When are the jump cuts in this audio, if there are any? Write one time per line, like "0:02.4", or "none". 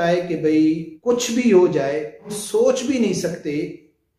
0:00.9
0:02.4